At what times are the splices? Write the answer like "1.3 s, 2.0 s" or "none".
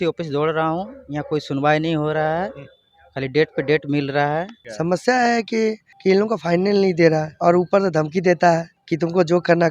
4.6 s, 5.9 s, 8.8 s